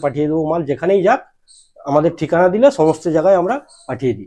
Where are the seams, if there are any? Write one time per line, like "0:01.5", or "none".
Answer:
none